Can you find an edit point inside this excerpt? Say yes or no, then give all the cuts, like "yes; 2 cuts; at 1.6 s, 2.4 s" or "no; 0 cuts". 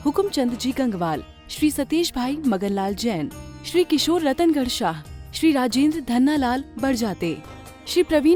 no; 0 cuts